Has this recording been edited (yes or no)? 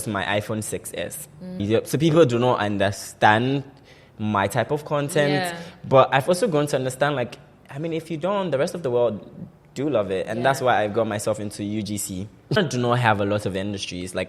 yes